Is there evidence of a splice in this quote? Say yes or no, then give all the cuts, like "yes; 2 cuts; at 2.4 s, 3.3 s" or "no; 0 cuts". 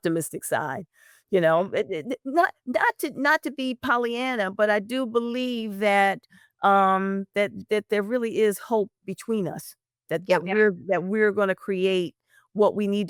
no; 0 cuts